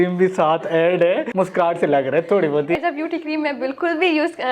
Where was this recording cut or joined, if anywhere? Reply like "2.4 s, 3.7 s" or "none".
1.3 s, 2.8 s